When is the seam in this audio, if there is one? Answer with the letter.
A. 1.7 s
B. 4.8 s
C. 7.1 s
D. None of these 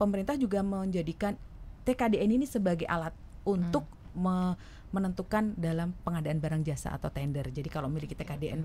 D